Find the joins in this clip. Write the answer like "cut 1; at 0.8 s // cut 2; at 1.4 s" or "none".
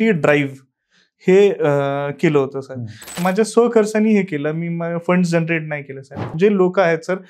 cut 1; at 3.2 s // cut 2; at 6.3 s